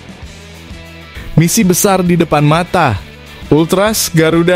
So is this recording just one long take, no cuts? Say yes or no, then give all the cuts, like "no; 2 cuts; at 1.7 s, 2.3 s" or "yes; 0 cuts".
no; 1 cut; at 1.2 s